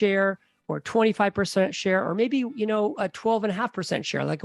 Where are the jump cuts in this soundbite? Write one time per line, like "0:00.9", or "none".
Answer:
none